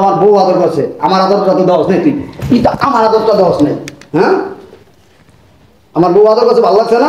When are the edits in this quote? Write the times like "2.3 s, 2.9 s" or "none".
none

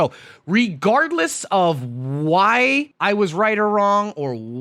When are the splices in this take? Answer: 2.9 s

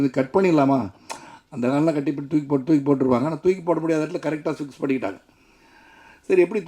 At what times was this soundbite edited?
none

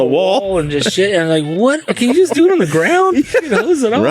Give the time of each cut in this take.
1.8 s

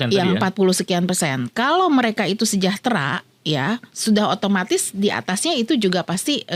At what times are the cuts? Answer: none

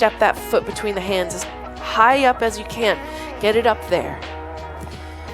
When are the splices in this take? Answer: none

